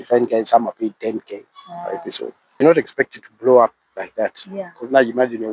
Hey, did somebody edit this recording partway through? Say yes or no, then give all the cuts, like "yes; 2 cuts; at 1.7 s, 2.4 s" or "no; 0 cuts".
yes; 1 cut; at 2.6 s